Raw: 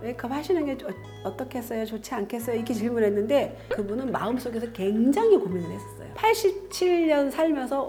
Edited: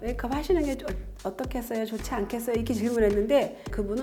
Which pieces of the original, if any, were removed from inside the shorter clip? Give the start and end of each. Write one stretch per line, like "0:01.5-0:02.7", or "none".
none